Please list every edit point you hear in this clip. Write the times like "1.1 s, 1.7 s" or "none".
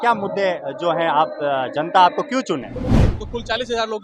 3.1 s